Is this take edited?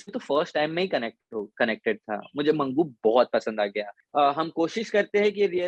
yes; 1 cut; at 4.0 s

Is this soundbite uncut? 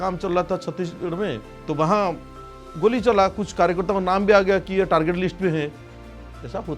no; 1 cut; at 1.5 s

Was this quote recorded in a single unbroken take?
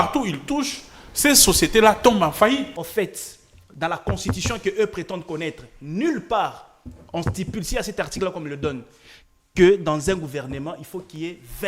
no; 1 cut; at 2.8 s

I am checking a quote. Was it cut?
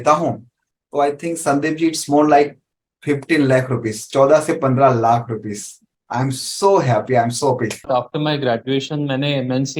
yes; 1 cut; at 7.9 s

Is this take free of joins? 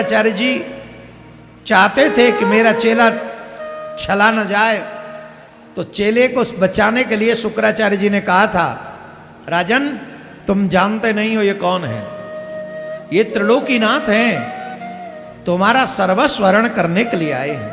yes; 0 cuts

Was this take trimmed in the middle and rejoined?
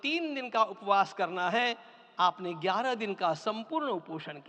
no; 0 cuts

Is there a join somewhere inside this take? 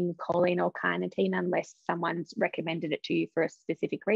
no; 0 cuts

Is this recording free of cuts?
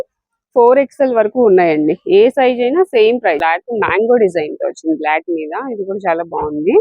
no; 1 cut; at 3.4 s

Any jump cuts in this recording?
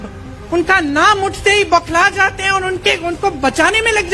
no; 0 cuts

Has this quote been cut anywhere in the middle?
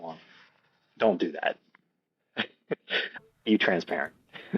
yes; 1 cut; at 3.2 s

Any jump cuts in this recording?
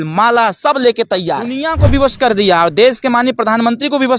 yes; 1 cut; at 1.7 s

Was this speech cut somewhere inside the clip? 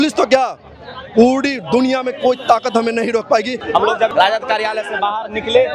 yes; 1 cut; at 3.7 s

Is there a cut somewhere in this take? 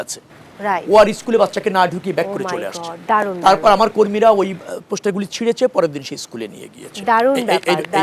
no; 0 cuts

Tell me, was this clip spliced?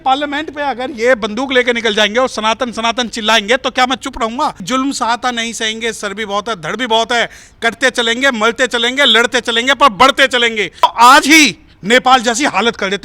yes; 2 cuts; at 4.6 s, 10.8 s

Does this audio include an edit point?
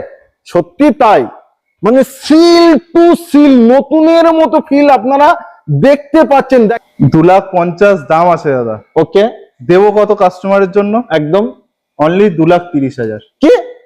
yes; 1 cut; at 6.8 s

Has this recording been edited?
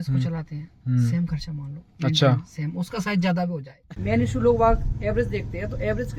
yes; 1 cut; at 3.7 s

